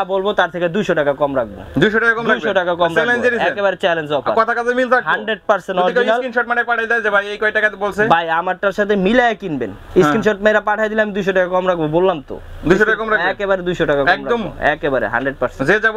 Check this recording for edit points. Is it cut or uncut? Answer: uncut